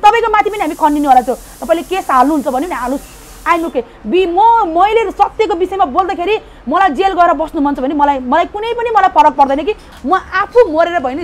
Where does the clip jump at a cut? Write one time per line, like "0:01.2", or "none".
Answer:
0:09.9